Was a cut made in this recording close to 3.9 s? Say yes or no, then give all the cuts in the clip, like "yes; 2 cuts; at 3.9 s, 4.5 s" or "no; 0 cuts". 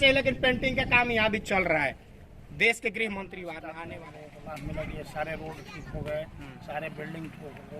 yes; 1 cut; at 3.9 s